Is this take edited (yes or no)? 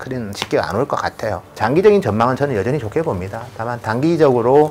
yes